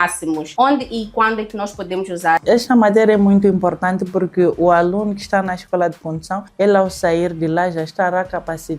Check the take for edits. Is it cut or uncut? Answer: cut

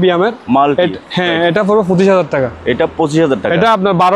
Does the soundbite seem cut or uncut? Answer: uncut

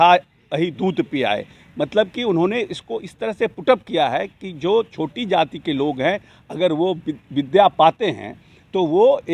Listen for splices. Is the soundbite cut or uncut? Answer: uncut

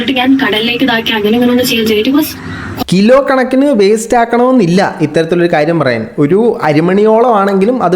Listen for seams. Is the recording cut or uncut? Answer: uncut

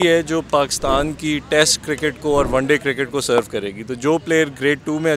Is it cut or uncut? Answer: uncut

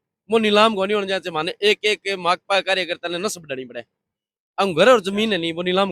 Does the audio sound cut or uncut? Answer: uncut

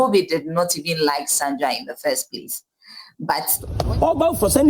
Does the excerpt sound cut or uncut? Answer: cut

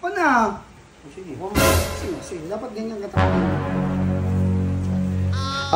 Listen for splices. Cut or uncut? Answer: uncut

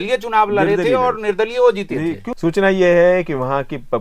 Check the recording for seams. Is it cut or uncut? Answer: cut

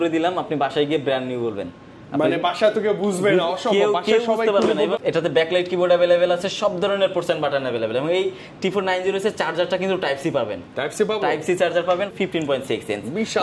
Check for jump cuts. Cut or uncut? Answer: cut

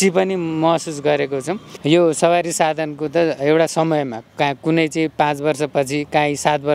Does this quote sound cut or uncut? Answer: cut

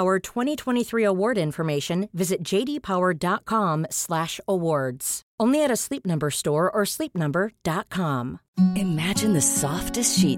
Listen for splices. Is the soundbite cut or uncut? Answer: cut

